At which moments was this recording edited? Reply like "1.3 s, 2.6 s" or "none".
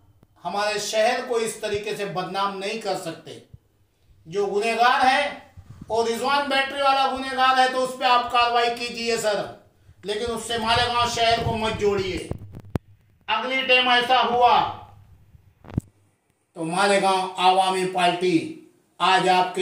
none